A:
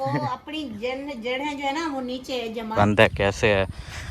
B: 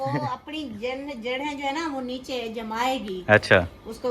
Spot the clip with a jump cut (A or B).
A